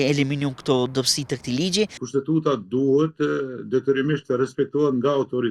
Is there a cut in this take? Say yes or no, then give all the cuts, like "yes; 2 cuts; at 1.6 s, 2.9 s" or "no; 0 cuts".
yes; 1 cut; at 2.0 s